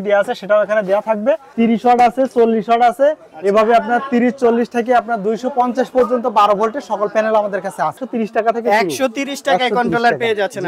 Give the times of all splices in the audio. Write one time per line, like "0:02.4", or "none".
0:01.5
0:08.0